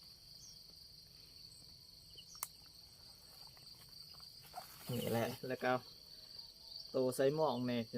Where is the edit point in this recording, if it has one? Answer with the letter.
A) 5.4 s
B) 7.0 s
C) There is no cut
A